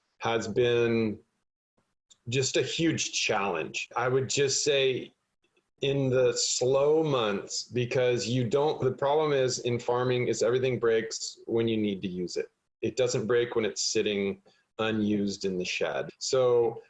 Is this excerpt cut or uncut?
uncut